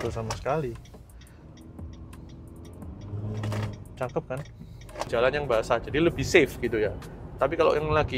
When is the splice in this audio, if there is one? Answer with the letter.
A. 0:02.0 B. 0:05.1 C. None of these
B